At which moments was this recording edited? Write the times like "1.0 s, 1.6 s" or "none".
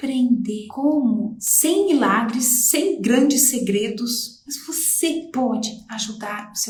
none